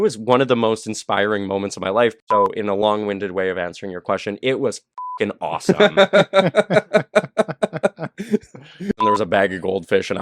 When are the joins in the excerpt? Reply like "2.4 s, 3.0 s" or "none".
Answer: 2.2 s, 9.0 s